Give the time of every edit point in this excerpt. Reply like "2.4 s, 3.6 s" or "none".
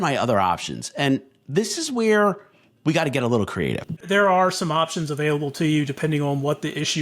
4.0 s